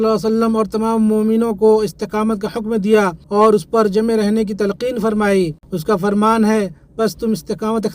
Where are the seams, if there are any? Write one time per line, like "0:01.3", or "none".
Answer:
0:03.2
0:05.7

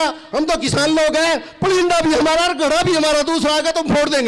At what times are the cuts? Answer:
none

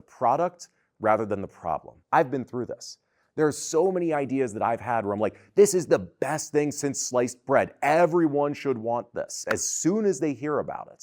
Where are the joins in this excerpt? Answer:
0:01.9
0:09.4

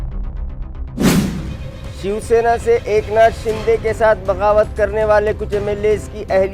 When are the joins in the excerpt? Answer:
none

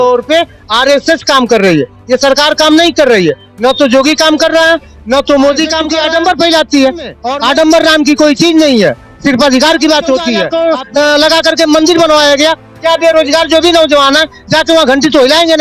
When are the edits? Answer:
0:05.9
0:07.2
0:10.5

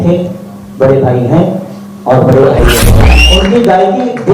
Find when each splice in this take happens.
0:03.2

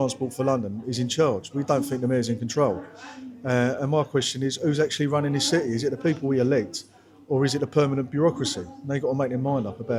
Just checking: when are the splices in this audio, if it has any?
none

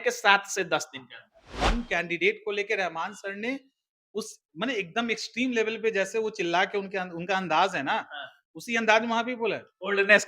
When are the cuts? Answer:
0:01.4

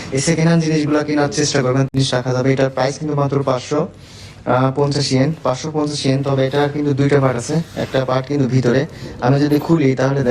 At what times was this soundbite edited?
0:01.9

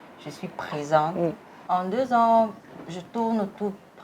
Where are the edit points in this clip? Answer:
0:01.5

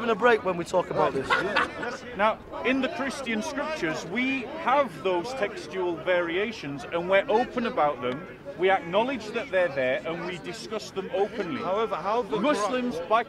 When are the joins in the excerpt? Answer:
0:01.9

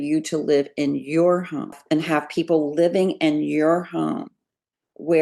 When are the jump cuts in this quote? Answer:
0:01.8

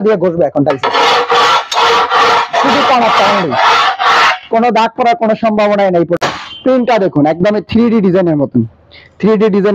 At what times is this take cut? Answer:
0:06.2

